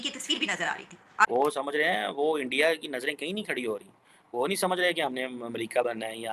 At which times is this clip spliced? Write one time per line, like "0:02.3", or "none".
0:01.3

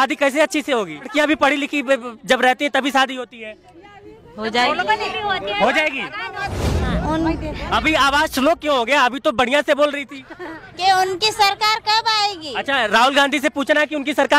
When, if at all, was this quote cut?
0:01.1
0:06.5

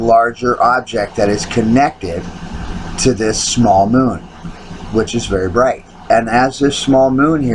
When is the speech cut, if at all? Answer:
0:03.9

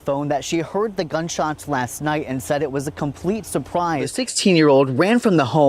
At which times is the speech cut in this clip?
0:04.2

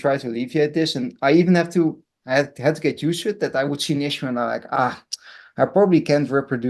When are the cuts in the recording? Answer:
none

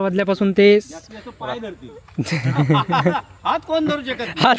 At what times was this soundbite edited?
none

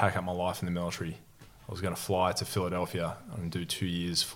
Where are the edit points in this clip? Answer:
none

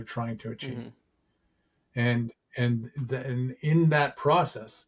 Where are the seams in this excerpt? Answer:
none

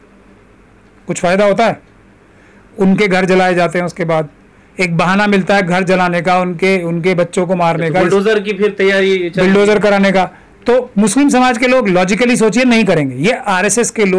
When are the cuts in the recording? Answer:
none

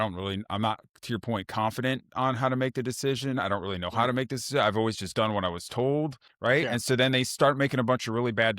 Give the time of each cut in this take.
0:06.2

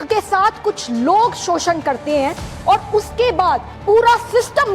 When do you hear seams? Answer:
0:03.7

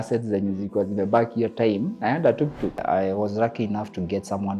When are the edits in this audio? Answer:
0:02.8

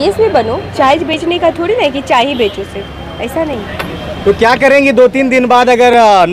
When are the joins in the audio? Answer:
none

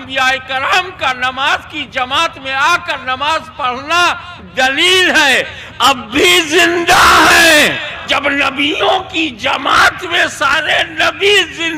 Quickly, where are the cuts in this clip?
0:08.1

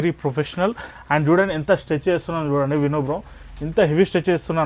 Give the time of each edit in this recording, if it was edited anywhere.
none

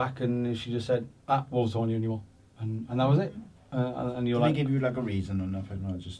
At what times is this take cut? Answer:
none

